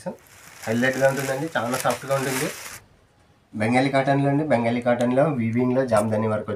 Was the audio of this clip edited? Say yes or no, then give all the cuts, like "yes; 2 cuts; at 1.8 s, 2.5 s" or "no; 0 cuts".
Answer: yes; 1 cut; at 2.7 s